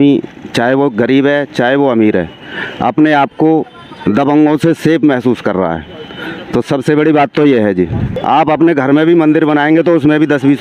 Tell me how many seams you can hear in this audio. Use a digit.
1